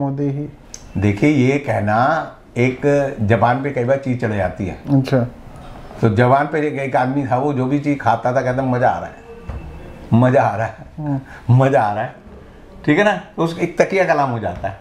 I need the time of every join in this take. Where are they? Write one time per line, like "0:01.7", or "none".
none